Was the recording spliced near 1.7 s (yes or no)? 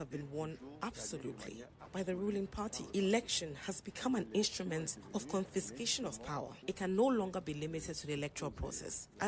no